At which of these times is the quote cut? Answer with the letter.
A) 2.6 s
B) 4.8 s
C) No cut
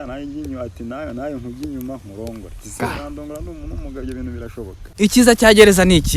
B